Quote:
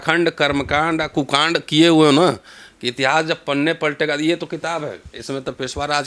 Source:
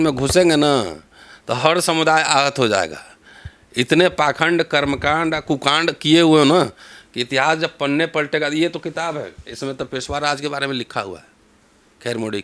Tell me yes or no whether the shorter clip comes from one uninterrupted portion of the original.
yes